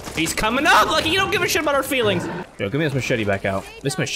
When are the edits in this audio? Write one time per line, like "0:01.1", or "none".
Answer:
0:02.5